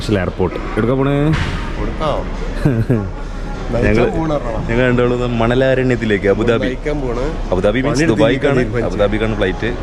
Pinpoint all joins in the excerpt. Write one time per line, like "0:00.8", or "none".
none